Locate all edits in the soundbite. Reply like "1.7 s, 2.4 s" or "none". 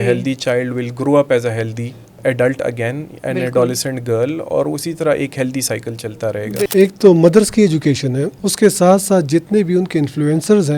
2.2 s, 6.6 s